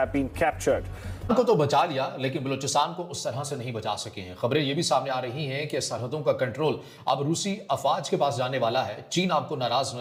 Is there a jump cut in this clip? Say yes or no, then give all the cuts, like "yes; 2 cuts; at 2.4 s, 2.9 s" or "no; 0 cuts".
no; 0 cuts